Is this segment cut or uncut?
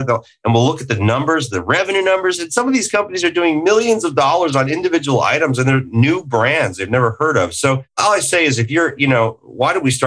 cut